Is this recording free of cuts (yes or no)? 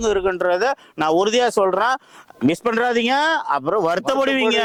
yes